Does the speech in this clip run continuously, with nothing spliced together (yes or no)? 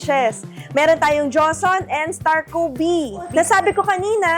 no